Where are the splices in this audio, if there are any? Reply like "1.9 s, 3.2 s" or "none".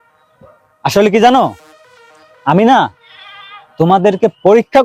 none